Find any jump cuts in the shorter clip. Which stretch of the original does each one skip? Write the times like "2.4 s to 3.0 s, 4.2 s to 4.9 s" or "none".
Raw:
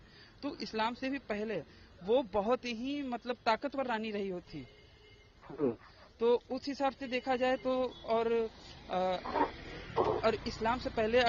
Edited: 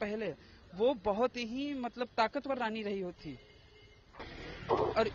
5.5 s to 9.5 s